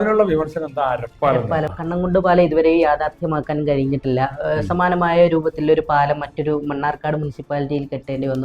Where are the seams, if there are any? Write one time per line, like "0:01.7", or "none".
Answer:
0:01.8